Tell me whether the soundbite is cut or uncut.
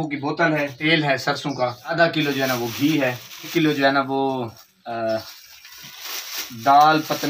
cut